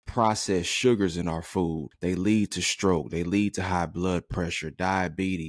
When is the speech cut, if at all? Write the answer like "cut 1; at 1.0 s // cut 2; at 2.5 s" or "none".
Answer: cut 1; at 1.9 s